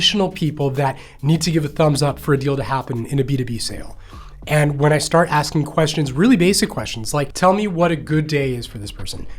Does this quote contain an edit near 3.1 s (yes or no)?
yes